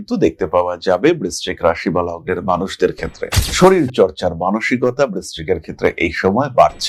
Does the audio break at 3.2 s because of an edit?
yes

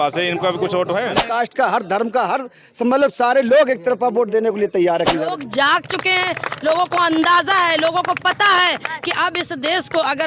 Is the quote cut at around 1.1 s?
yes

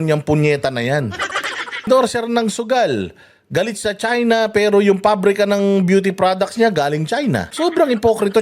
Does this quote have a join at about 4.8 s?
no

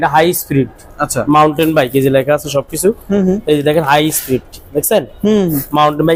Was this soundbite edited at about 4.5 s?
no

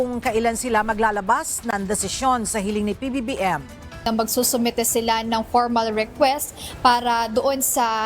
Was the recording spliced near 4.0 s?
yes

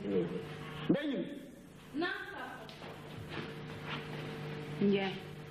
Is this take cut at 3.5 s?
yes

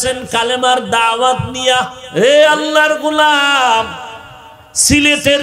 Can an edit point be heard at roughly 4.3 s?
no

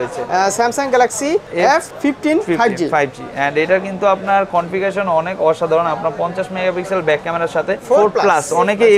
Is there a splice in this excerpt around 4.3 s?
no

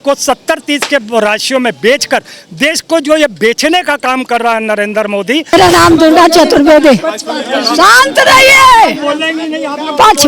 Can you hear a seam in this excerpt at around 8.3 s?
no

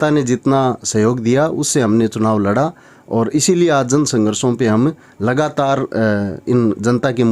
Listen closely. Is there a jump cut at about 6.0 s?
no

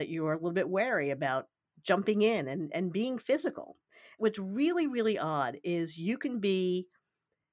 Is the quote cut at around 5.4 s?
no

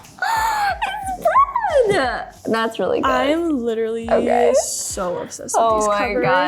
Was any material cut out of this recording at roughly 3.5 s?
no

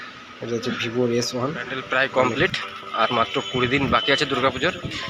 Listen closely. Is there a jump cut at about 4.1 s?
no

